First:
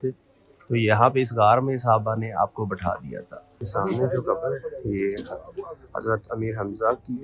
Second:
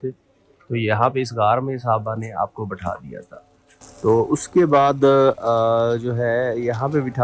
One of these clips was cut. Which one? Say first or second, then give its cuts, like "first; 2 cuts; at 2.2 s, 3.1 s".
first; 1 cut; at 3.6 s